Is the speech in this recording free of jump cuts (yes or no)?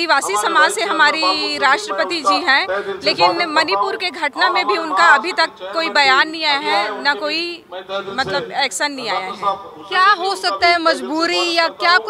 yes